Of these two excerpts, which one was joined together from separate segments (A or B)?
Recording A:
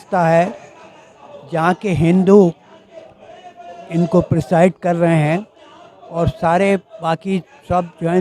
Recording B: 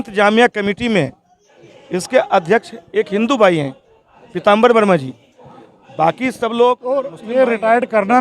B